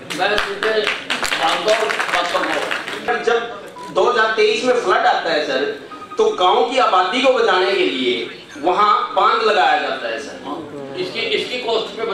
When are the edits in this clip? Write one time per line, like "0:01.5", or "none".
0:03.1